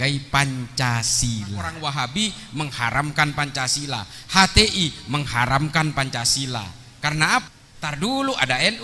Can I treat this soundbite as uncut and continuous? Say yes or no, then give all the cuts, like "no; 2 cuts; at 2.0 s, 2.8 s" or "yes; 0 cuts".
no; 2 cuts; at 1.8 s, 7.4 s